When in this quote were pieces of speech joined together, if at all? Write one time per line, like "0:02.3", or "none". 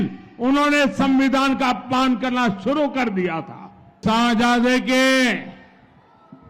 0:04.0